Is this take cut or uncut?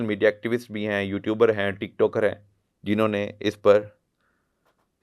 uncut